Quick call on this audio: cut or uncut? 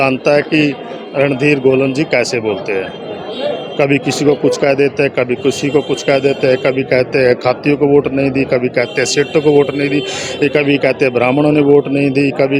uncut